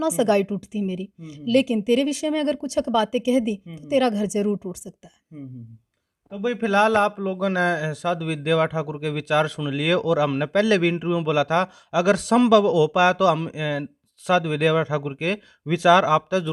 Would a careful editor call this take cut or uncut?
uncut